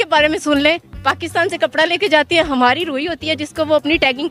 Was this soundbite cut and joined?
no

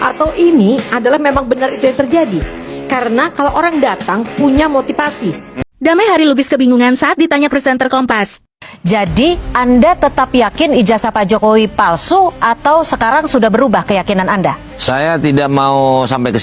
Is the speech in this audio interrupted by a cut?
yes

